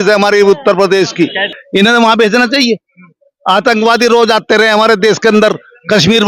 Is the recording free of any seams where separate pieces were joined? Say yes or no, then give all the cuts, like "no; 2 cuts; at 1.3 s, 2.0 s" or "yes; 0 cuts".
no; 1 cut; at 1.6 s